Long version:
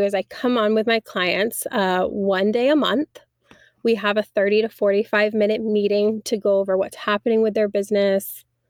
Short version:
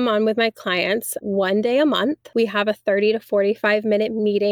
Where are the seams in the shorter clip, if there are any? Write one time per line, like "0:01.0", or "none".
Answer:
0:01.2
0:02.2